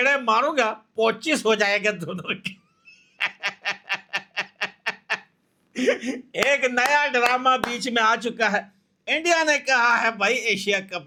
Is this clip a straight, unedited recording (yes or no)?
yes